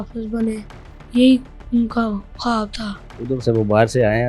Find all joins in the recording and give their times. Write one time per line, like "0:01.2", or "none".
0:03.1

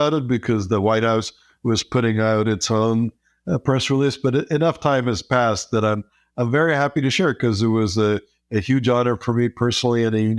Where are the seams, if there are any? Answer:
none

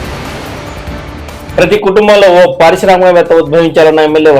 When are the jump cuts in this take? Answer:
none

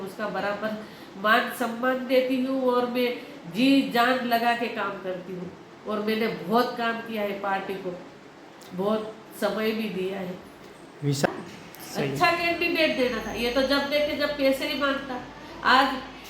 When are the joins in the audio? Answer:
0:11.3

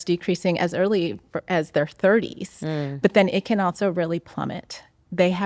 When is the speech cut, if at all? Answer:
none

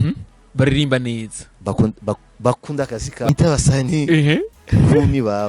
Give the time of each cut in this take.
0:03.3

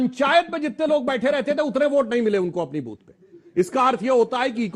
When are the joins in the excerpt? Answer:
none

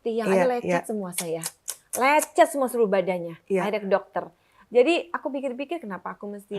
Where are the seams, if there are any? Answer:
none

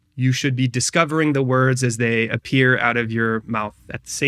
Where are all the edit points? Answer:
none

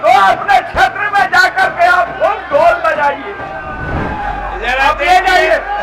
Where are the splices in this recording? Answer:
0:04.0

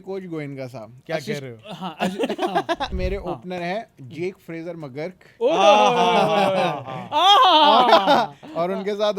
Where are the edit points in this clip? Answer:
0:02.9

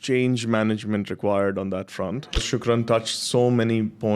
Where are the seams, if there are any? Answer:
0:02.4

